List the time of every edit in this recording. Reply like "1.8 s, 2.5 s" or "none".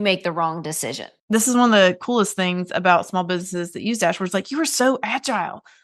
1.1 s